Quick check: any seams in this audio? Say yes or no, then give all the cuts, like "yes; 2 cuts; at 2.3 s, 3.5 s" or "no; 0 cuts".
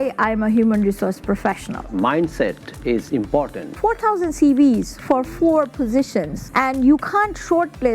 yes; 3 cuts; at 1.9 s, 3.8 s, 6.4 s